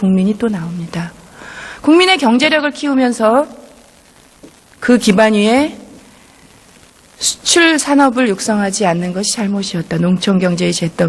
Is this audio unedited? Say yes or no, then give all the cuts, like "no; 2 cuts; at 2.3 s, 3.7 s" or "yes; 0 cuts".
yes; 0 cuts